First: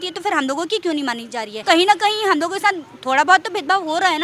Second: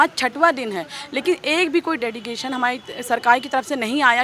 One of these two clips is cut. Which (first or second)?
first